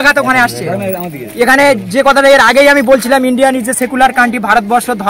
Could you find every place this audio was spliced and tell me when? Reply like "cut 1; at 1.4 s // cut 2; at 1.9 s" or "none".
none